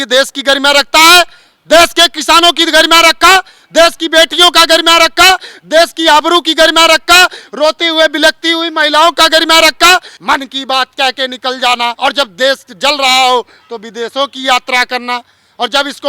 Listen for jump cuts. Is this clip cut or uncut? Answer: cut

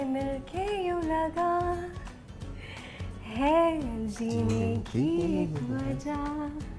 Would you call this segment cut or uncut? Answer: uncut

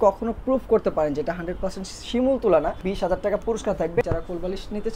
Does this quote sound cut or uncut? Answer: cut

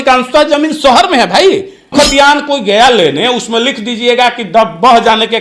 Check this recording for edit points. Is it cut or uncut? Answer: cut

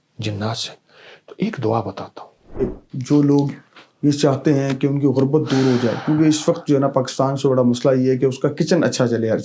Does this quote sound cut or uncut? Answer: cut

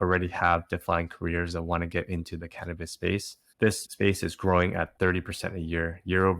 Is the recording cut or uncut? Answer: uncut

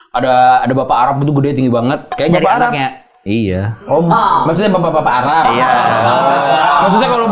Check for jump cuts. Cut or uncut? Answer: uncut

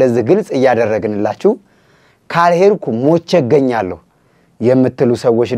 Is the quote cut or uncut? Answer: uncut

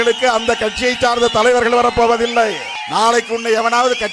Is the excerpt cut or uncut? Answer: cut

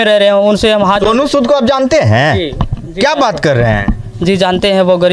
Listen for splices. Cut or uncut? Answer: uncut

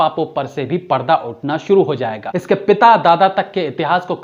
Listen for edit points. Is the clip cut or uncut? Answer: cut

